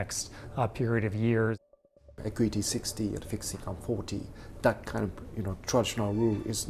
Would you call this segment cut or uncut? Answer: cut